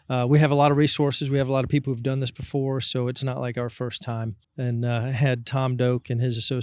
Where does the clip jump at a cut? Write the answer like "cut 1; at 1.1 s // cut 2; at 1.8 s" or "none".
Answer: cut 1; at 4.4 s